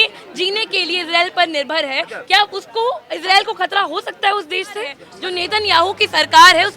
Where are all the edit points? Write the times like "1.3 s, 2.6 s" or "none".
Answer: 3.1 s, 5.1 s